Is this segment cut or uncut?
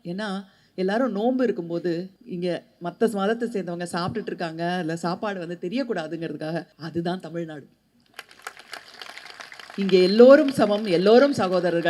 cut